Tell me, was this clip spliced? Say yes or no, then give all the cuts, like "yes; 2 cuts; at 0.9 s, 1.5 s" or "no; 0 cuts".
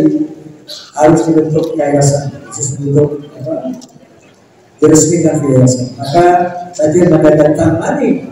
no; 0 cuts